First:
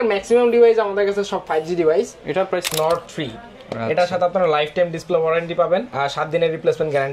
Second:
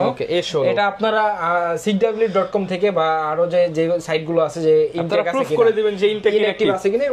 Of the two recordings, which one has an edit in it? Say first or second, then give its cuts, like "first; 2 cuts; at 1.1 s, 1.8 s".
first; 2 cuts; at 2.7 s, 5.9 s